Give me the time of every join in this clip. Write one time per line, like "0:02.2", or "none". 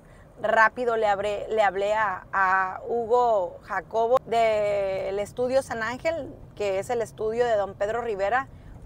none